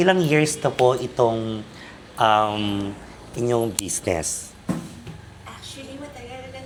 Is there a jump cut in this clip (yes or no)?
no